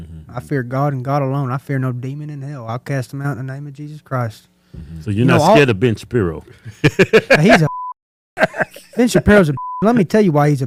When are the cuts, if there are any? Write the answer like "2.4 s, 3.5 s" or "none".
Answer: none